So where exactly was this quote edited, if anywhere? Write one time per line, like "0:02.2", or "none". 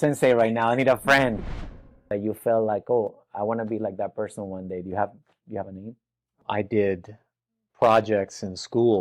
0:01.9
0:06.3

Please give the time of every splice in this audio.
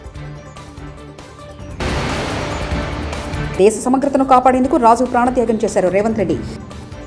0:01.3

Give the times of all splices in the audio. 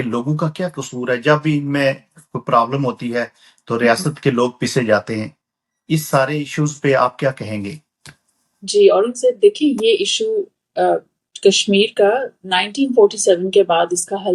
none

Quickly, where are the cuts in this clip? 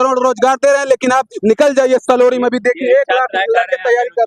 none

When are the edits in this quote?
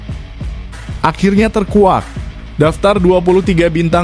0:01.0

